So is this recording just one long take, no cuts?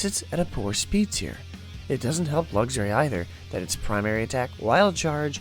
no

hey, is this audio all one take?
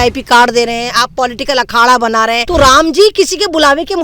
no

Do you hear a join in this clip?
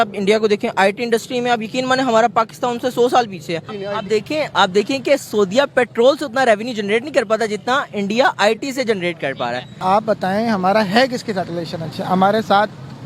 yes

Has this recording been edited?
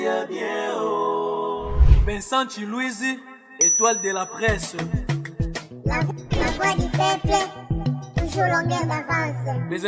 no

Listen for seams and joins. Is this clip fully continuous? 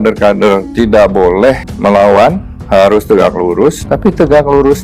no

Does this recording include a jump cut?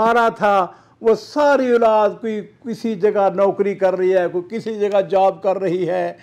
no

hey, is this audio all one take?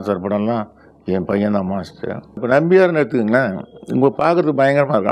no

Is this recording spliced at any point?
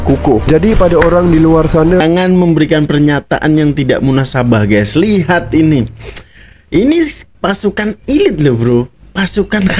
yes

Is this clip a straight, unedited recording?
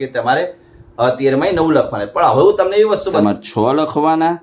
no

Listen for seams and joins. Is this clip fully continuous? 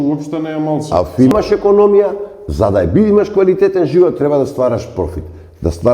no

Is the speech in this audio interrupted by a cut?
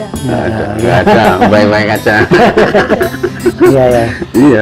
no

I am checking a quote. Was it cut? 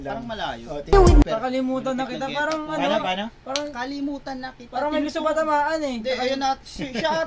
yes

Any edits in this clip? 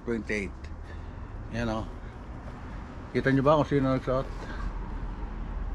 no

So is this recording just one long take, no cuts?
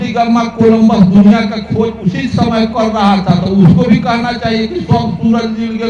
yes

